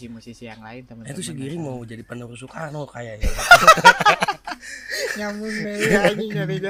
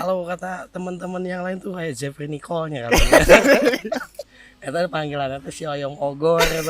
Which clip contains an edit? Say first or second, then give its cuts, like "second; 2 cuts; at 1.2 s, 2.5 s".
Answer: second; 1 cut; at 4.1 s